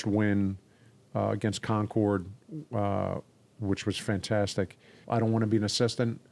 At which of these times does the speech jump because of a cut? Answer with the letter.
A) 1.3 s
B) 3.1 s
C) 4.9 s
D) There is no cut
C